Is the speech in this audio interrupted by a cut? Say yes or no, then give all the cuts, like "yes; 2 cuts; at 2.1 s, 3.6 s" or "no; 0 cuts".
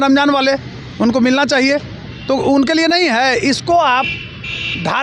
no; 0 cuts